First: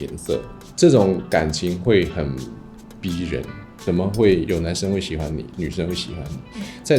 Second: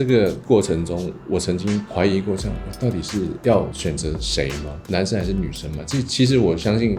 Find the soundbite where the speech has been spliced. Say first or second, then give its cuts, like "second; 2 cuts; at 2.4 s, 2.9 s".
first; 1 cut; at 3.8 s